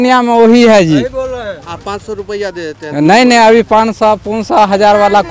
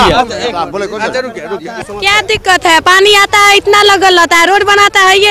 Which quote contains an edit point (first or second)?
second